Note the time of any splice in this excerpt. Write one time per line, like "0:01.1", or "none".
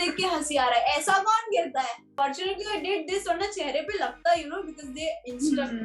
0:02.1